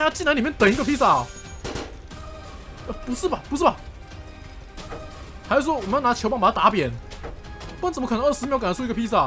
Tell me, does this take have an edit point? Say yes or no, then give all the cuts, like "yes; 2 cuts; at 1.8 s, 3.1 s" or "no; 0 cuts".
no; 0 cuts